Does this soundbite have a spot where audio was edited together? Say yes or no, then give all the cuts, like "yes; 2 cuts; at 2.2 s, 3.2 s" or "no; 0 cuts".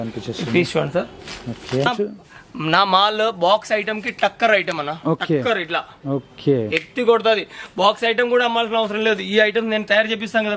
yes; 1 cut; at 1.9 s